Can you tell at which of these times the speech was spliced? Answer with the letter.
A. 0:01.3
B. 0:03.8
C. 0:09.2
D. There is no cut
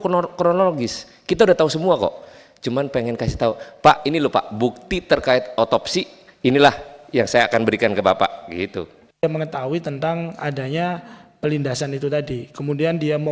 C